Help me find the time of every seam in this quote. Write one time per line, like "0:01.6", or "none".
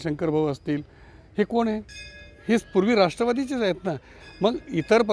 none